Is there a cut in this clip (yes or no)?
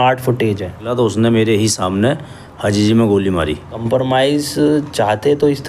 yes